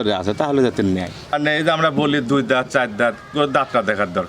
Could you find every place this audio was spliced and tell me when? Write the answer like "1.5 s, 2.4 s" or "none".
1.3 s